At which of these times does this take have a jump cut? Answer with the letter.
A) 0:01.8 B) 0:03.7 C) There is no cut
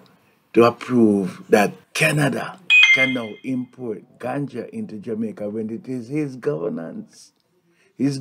A